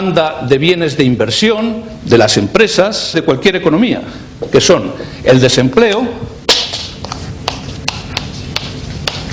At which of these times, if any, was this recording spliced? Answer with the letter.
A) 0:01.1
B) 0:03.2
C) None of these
C